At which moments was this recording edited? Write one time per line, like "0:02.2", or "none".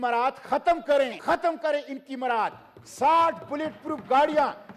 0:01.2